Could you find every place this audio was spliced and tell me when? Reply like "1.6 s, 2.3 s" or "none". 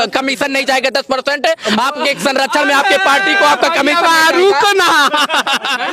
none